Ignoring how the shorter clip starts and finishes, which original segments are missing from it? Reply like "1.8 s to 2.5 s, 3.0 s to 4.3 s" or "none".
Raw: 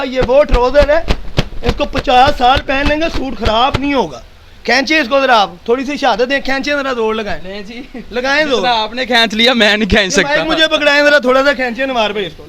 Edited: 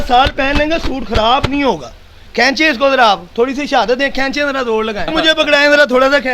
7.4 s to 10.4 s